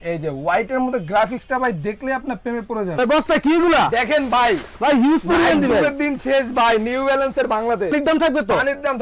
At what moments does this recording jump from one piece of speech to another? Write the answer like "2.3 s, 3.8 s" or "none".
2.9 s, 7.9 s